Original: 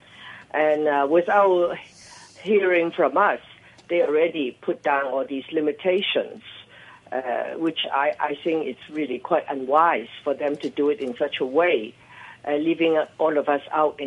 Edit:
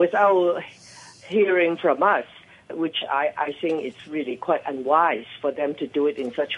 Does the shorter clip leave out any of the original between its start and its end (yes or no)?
yes